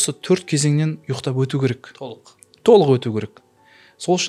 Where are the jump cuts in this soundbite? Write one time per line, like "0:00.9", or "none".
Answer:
none

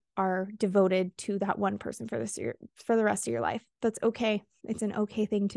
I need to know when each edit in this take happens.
0:04.6

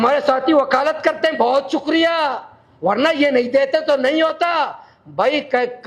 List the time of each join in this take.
none

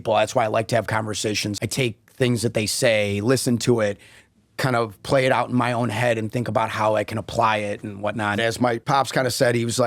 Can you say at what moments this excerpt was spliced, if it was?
0:01.5
0:08.4

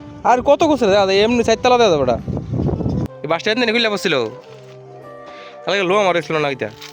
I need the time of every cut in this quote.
0:03.0

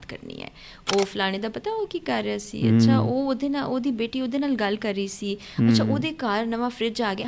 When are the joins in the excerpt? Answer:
none

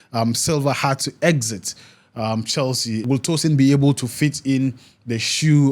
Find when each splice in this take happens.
0:03.0

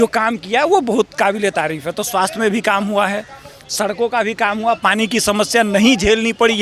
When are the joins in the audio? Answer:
none

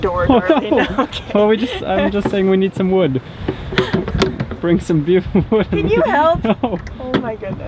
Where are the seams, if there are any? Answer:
none

